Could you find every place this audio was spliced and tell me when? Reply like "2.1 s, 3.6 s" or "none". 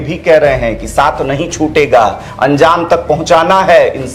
none